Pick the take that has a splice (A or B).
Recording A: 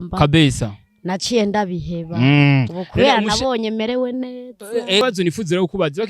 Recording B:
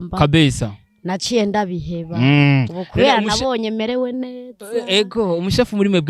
A